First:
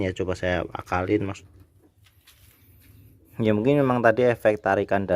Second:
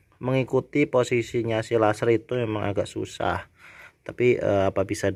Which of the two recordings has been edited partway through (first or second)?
first